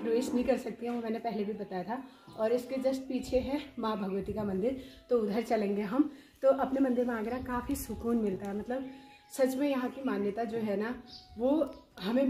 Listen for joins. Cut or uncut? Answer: uncut